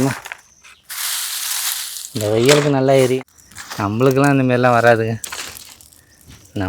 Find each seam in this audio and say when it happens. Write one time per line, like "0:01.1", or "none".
0:03.1

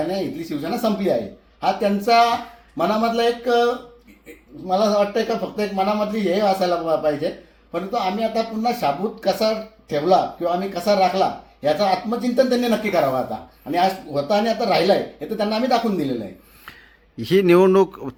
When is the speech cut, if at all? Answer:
none

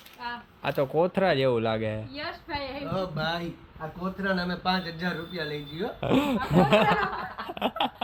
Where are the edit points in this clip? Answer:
none

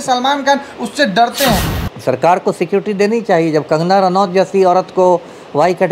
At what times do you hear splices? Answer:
0:01.6

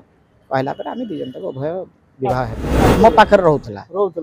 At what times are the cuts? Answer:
0:02.9

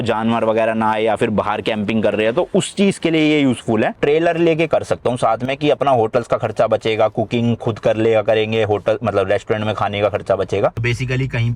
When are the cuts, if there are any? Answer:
0:03.9
0:10.8

